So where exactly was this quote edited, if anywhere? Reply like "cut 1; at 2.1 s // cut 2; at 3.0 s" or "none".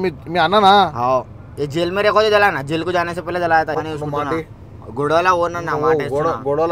cut 1; at 3.7 s